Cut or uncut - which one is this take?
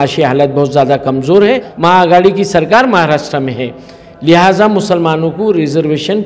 cut